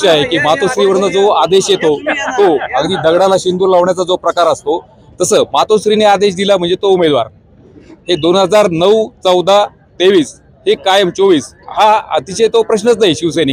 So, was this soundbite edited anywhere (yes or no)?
no